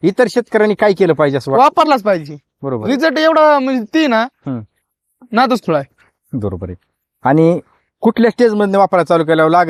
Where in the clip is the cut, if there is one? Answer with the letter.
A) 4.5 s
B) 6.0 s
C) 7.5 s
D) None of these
D